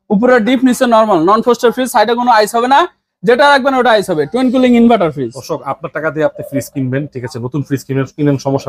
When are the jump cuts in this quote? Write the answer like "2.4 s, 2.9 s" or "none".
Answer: none